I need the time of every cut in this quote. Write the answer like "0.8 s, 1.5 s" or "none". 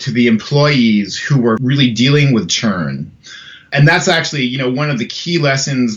1.6 s, 3.7 s